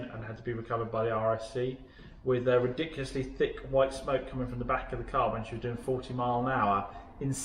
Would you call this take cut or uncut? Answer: uncut